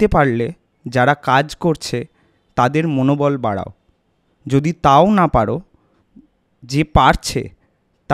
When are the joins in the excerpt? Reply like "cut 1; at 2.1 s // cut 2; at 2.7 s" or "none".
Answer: none